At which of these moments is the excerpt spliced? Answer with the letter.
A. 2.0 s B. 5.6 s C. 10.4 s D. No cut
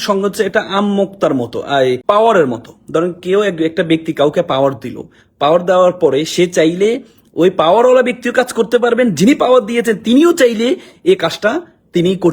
A